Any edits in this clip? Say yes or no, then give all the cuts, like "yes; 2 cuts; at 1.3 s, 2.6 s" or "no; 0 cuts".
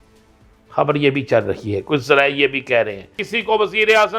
yes; 1 cut; at 3.3 s